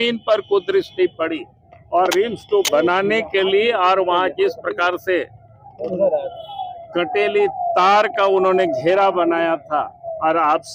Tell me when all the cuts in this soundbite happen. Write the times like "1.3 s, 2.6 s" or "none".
none